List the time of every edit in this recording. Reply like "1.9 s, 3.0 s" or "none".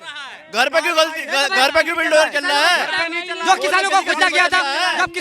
none